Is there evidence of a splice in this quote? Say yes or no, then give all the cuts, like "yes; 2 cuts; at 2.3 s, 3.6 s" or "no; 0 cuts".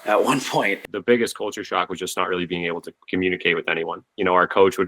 yes; 3 cuts; at 0.8 s, 2.9 s, 4.0 s